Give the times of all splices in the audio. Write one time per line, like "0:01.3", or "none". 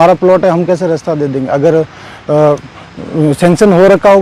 none